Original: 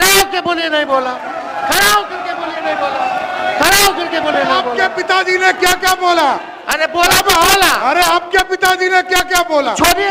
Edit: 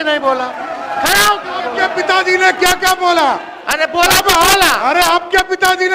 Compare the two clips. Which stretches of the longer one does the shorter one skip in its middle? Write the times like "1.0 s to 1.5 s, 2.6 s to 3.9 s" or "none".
2.3 s to 4.7 s